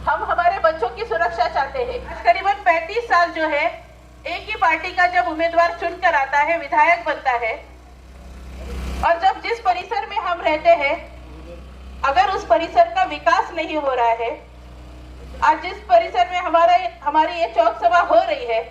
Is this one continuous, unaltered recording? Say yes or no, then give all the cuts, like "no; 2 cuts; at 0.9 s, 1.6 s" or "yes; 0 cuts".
no; 1 cut; at 2.2 s